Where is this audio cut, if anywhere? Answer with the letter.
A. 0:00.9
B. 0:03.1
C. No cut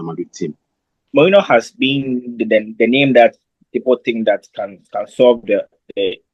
A